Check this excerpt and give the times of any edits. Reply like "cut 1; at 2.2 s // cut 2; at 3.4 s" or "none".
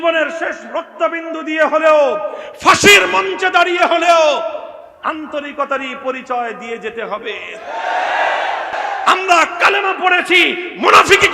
cut 1; at 8.7 s